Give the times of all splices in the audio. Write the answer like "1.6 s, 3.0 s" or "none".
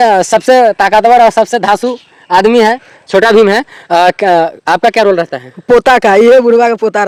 none